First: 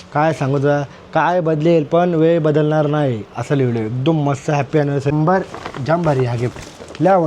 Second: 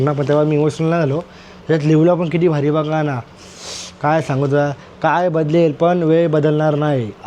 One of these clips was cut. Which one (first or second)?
first